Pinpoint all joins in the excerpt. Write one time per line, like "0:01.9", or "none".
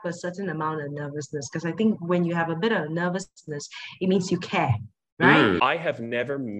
0:05.6